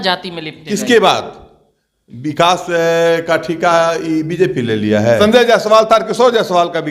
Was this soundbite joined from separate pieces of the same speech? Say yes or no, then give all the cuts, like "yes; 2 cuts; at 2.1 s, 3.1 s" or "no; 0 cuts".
yes; 1 cut; at 5.2 s